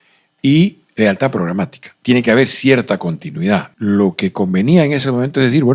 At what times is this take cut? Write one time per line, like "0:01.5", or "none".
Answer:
0:03.7

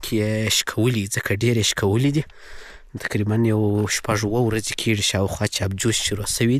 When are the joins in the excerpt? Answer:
none

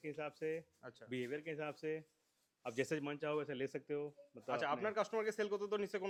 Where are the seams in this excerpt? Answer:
none

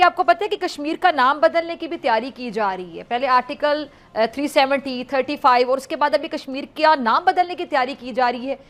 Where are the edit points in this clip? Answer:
none

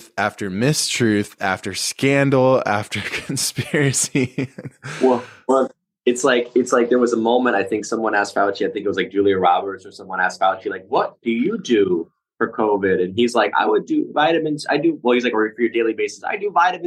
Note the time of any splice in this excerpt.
none

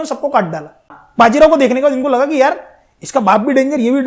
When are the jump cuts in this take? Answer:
0:01.0

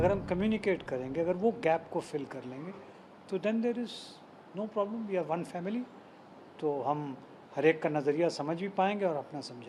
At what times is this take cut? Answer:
none

